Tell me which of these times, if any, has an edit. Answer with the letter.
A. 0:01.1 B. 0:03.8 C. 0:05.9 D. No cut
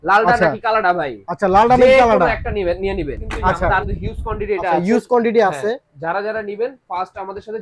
B